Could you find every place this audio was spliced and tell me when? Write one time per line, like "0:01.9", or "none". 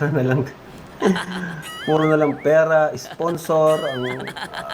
0:03.5